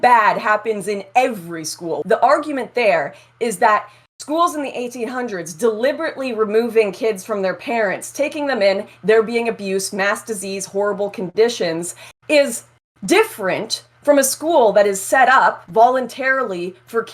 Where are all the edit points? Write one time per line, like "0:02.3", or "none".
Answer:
0:02.0
0:15.6